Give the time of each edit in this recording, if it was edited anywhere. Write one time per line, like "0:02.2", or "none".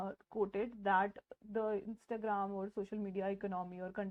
none